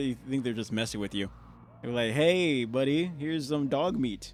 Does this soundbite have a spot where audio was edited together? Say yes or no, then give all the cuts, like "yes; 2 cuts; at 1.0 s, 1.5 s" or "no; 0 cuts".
no; 0 cuts